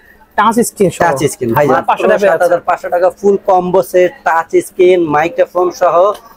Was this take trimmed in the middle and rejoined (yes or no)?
yes